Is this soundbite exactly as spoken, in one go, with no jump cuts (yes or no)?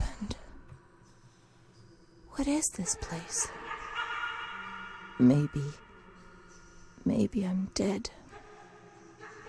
yes